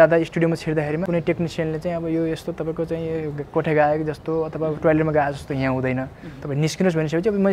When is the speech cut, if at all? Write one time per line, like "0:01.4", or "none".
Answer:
0:01.0